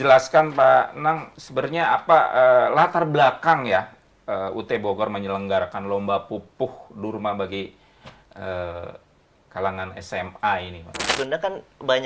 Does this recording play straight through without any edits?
no; 1 cut; at 11.1 s

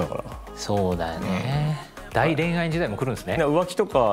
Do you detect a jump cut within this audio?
yes; 2 cuts; at 1.9 s, 3.4 s

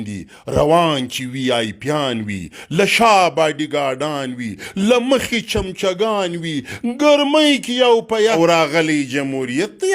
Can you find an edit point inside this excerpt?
yes; 1 cut; at 8.3 s

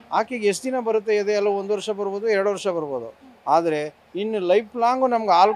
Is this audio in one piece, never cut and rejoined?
yes; 0 cuts

